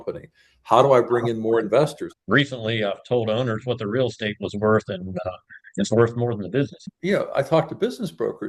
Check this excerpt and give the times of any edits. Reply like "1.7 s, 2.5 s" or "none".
2.0 s, 6.8 s